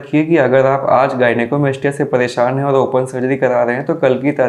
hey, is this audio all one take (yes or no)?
yes